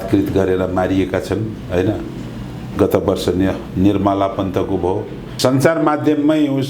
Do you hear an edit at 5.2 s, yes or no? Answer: yes